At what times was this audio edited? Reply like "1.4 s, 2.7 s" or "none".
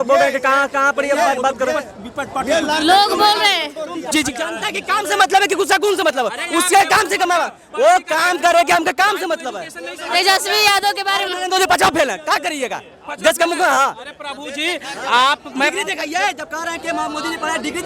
4.1 s

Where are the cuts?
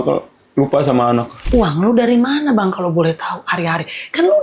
1.4 s

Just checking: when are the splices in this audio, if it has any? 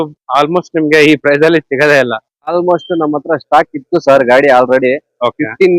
2.5 s

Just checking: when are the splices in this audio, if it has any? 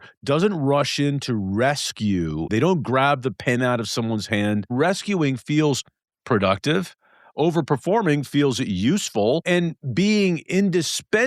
2.5 s, 4.7 s, 9.4 s

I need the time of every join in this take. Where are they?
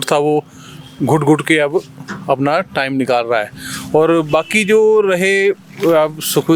none

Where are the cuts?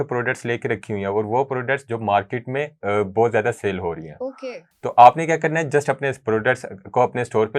none

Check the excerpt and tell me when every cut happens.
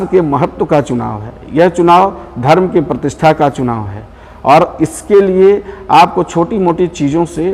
none

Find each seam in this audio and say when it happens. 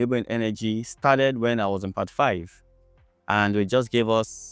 none

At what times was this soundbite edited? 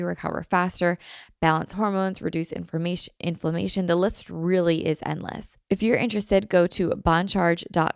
5.5 s

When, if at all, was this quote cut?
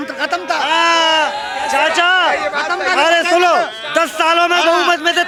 none

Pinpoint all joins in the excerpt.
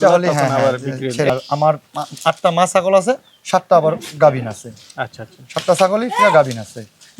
1.3 s

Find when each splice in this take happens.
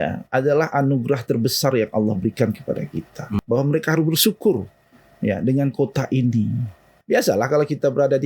3.3 s, 6.9 s

